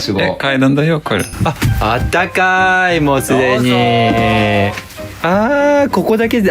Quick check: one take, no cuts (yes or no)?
no